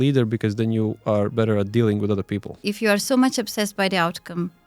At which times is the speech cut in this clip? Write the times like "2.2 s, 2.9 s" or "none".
2.6 s

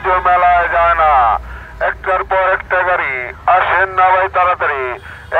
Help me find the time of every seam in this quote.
none

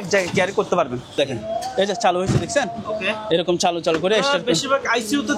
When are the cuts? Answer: 1.2 s

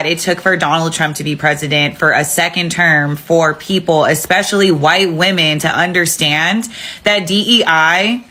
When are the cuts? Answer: none

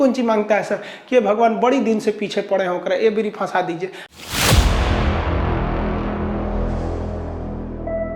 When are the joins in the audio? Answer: 4.1 s

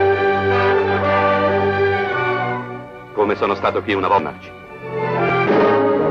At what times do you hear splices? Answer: none

